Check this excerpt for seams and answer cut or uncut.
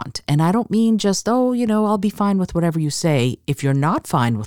uncut